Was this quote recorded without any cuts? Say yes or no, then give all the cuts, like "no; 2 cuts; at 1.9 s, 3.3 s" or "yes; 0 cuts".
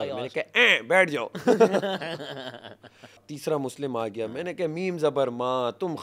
no; 1 cut; at 3.3 s